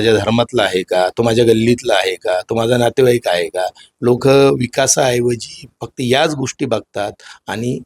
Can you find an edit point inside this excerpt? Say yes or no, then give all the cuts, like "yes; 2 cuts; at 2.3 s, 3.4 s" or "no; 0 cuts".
no; 0 cuts